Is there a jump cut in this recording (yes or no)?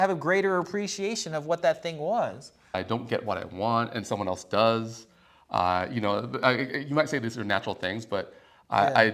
yes